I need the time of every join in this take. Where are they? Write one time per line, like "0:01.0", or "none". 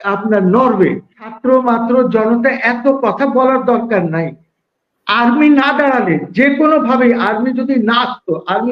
0:01.2